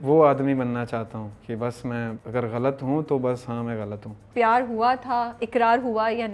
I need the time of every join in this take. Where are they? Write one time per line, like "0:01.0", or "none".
0:02.2
0:04.2